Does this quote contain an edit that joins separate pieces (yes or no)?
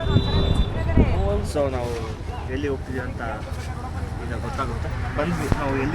yes